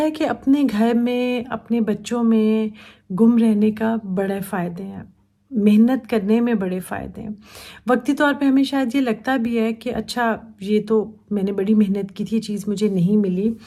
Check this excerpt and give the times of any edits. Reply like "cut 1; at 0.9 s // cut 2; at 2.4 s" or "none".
none